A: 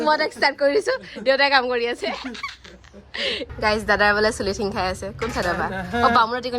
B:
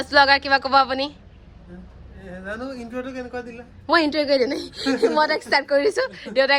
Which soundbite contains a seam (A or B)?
A